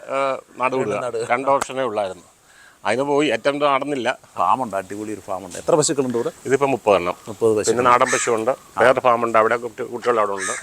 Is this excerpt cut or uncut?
cut